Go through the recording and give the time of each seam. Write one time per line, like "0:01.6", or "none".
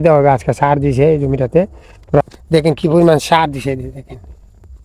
0:02.2